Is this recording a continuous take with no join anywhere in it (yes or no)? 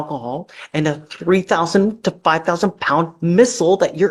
yes